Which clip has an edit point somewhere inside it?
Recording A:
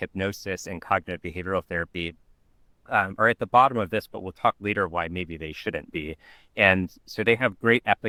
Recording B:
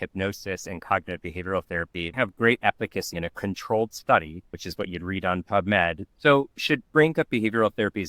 B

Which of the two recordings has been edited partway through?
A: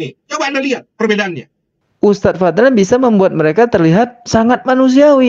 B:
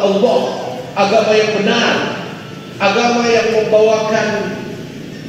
A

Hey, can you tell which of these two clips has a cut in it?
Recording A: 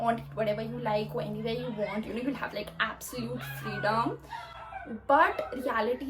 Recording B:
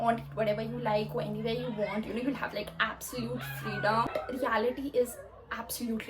B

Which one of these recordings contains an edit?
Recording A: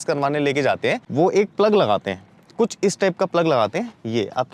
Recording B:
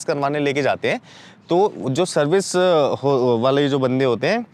A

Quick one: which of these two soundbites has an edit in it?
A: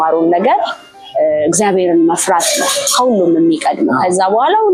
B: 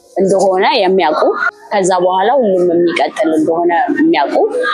B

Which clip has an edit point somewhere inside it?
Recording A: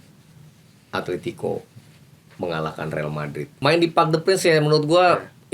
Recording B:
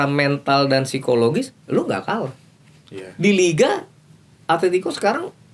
A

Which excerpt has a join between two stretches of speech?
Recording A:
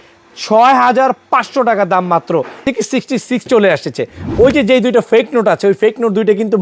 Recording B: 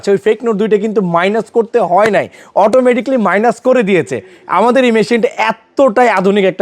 A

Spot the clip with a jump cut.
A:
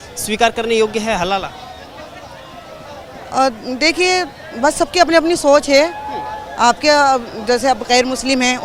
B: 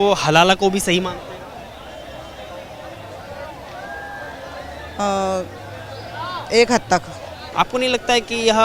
B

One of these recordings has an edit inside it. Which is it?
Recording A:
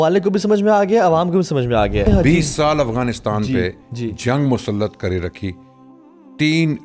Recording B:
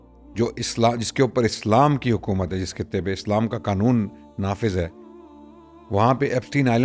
A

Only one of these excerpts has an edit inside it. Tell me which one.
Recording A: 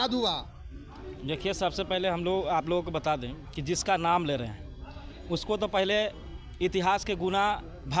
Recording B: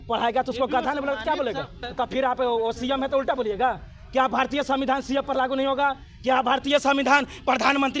B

